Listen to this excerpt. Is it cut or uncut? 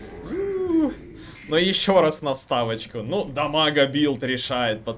uncut